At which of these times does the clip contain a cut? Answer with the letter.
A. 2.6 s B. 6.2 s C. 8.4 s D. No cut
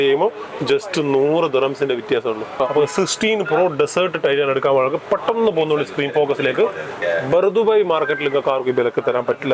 A